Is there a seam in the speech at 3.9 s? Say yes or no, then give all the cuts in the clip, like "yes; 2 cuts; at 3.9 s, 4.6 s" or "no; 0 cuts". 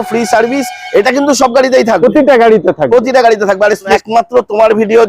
yes; 1 cut; at 3.9 s